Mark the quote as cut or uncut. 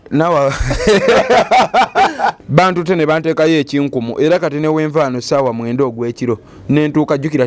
cut